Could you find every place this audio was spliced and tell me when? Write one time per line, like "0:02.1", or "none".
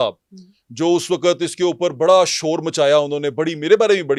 none